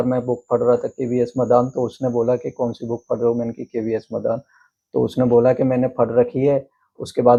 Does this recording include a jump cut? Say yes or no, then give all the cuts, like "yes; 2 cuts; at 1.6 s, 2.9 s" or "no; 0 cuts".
no; 0 cuts